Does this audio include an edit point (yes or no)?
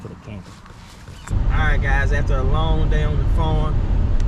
no